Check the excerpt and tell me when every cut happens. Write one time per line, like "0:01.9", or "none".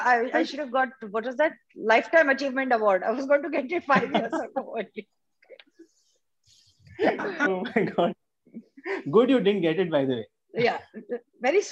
none